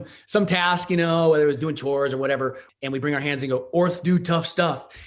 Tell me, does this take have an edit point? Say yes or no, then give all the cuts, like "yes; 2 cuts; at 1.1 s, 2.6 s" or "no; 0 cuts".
yes; 1 cut; at 2.7 s